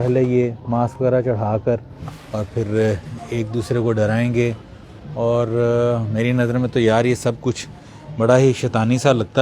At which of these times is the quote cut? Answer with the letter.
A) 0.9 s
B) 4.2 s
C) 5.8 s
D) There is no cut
D